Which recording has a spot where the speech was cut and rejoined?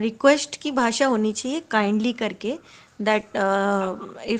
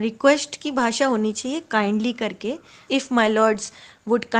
second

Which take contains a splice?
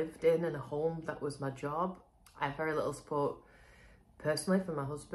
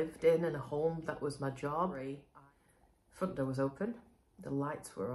second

